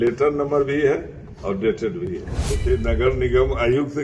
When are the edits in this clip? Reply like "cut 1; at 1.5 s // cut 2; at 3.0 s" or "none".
cut 1; at 2.5 s